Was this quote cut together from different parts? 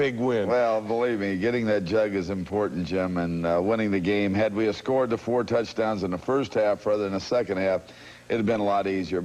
yes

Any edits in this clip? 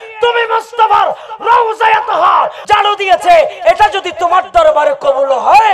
no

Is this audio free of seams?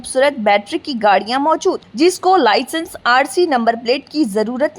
yes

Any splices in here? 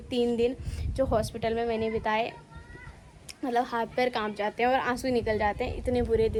no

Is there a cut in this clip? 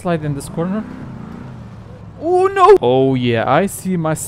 no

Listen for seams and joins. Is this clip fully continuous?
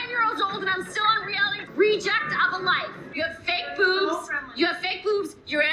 no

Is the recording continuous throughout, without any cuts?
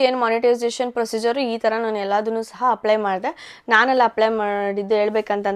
yes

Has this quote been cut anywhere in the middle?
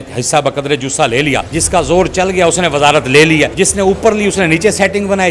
yes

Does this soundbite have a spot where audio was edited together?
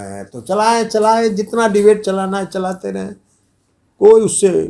no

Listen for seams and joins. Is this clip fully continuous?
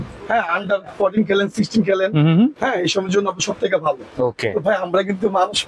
yes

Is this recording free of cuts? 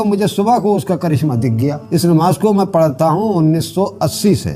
no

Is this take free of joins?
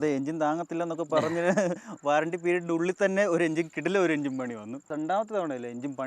no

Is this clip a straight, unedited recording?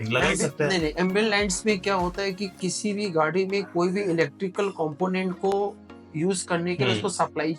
yes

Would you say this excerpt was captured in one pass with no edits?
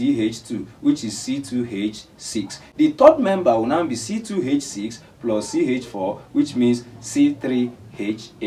yes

